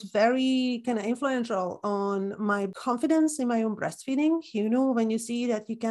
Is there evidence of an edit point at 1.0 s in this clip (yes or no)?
no